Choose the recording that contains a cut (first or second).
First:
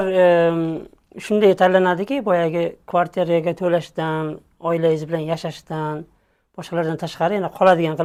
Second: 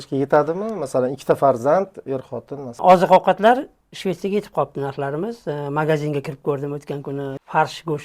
second